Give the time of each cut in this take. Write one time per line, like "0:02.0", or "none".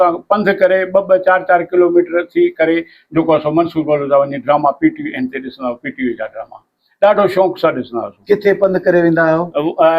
none